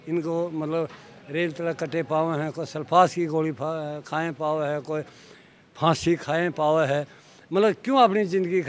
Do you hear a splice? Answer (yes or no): no